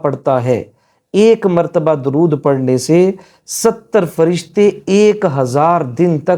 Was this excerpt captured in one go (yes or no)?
yes